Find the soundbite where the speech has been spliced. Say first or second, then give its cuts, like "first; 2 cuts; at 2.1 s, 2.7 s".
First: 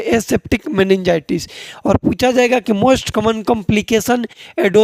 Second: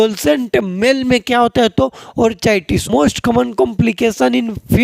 second; 1 cut; at 2.9 s